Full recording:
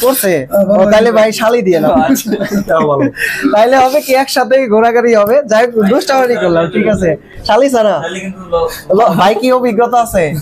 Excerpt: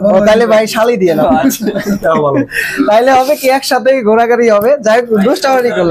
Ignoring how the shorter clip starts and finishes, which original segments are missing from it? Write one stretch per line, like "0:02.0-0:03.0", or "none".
none